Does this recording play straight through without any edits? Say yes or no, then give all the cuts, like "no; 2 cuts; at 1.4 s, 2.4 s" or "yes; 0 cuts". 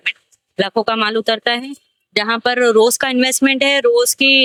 yes; 0 cuts